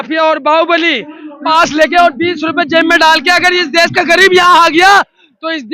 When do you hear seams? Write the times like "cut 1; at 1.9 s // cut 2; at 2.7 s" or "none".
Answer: cut 1; at 1.4 s

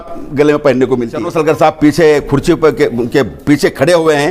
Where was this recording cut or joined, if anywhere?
cut 1; at 1.3 s

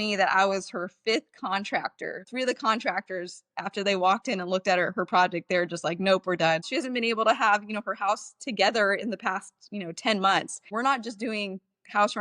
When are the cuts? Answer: cut 1; at 2.3 s // cut 2; at 6.7 s // cut 3; at 10.7 s

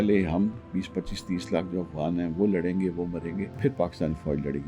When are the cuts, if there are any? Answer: cut 1; at 3.5 s

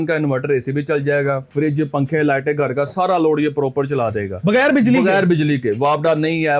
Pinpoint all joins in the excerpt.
none

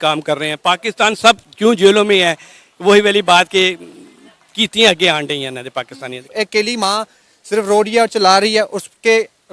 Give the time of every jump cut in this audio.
none

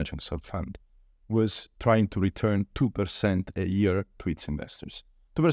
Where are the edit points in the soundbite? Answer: none

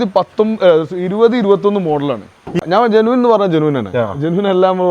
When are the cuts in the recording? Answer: cut 1; at 2.6 s

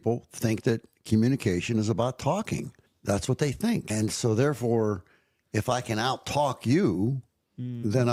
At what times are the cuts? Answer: none

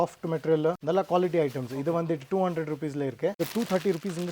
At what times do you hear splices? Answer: cut 1; at 0.8 s // cut 2; at 3.4 s

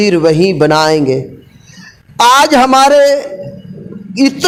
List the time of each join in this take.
none

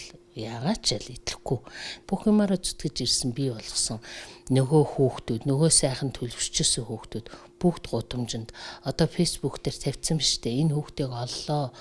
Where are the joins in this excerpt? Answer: cut 1; at 2.0 s

